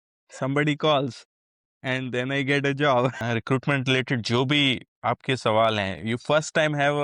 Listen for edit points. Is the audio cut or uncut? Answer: cut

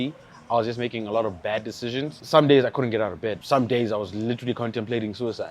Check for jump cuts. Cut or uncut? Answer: cut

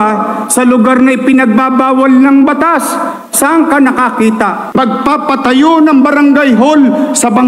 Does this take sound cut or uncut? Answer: cut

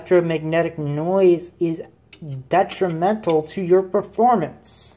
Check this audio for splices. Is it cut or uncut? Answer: uncut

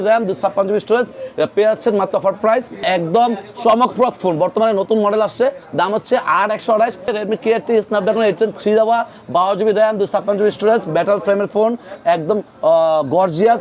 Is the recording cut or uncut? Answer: cut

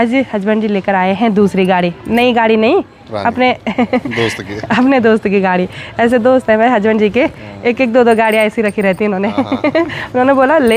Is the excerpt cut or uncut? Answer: uncut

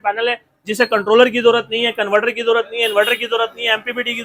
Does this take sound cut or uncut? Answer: uncut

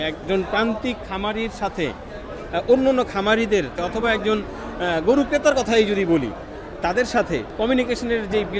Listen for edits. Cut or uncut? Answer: cut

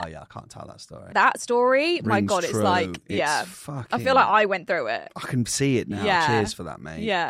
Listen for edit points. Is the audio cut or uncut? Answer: cut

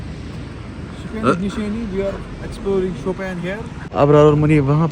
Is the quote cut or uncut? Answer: cut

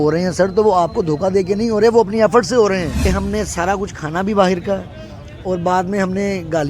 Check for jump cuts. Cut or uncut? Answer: cut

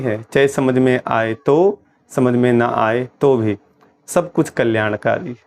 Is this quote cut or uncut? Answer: uncut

